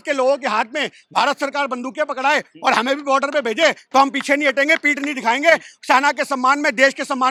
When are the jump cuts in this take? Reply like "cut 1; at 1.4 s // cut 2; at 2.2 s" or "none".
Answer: none

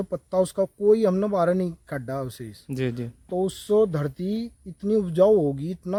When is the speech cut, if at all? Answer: none

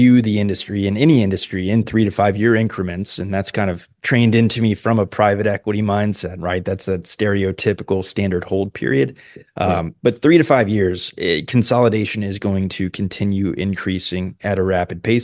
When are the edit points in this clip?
none

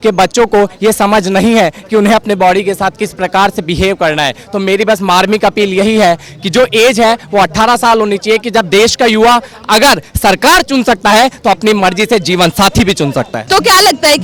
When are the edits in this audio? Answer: none

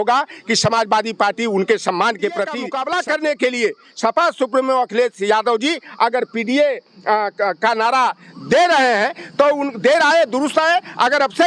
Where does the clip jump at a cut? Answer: cut 1; at 2.7 s

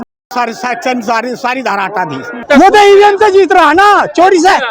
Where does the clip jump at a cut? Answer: cut 1; at 2.4 s

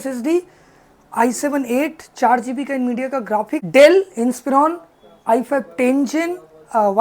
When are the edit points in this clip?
cut 1; at 3.7 s

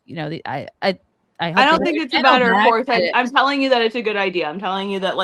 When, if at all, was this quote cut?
none

